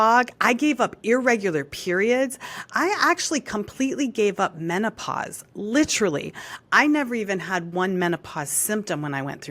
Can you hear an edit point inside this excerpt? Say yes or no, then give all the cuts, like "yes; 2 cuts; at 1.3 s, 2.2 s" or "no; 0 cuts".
no; 0 cuts